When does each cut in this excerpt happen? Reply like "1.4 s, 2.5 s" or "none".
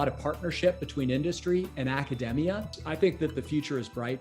2.8 s